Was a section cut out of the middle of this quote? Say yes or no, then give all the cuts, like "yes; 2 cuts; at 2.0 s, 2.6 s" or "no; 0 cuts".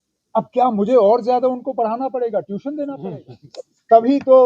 yes; 1 cut; at 3.0 s